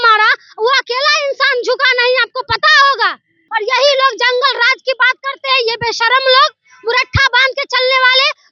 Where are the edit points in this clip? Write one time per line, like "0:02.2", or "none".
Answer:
0:03.4